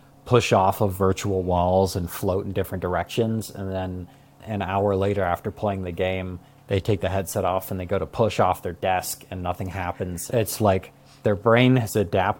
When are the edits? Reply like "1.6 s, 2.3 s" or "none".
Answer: 4.4 s

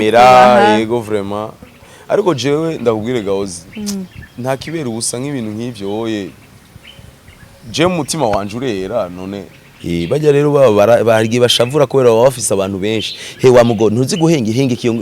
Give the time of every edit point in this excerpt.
9.8 s

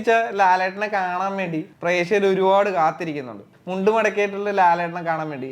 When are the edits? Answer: 1.7 s, 3.5 s

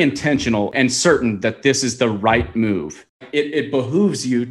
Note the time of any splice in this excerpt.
0.7 s, 3.2 s

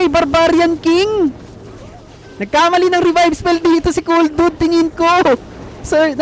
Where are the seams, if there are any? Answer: none

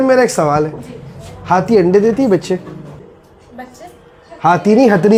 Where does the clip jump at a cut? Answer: none

